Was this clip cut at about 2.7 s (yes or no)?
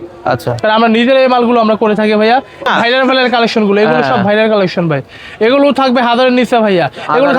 yes